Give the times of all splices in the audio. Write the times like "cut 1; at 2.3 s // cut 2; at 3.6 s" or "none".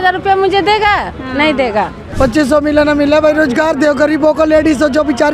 cut 1; at 2.0 s